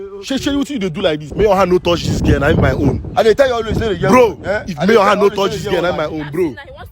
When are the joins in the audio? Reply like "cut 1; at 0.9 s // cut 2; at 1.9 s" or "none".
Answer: cut 1; at 1.3 s

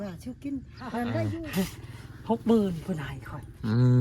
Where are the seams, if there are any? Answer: cut 1; at 1.4 s

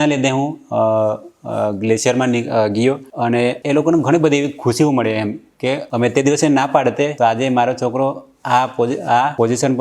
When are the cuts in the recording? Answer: cut 1; at 3.6 s

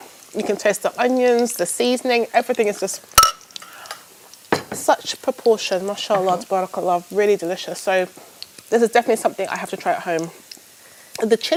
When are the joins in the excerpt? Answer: none

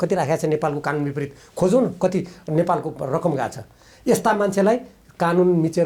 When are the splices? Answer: none

